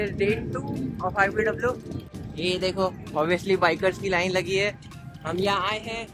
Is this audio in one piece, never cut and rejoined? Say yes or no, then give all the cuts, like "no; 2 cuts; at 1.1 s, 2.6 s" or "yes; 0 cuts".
yes; 0 cuts